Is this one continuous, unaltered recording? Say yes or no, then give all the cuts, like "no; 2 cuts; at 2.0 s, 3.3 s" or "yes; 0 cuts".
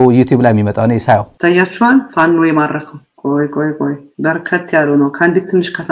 no; 1 cut; at 1.3 s